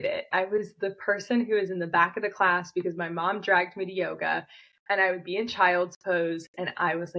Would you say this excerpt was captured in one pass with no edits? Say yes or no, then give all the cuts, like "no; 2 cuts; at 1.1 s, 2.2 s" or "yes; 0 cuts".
yes; 0 cuts